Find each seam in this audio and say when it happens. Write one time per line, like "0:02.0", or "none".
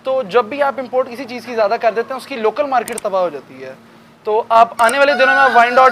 none